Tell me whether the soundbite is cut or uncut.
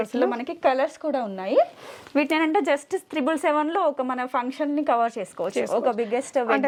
uncut